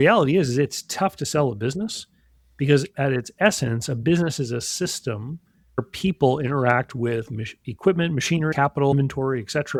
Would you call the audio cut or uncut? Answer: uncut